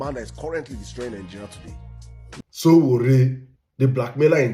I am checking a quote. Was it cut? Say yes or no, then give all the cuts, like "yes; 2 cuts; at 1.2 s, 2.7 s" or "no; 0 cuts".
yes; 1 cut; at 2.3 s